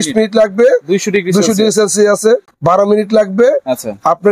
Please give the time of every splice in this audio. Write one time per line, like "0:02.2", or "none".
0:02.5